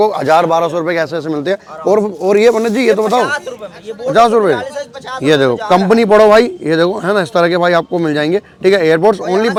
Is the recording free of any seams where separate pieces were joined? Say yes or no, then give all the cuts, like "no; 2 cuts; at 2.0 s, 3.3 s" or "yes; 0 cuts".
yes; 0 cuts